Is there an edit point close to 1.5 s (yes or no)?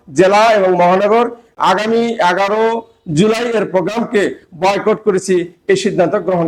no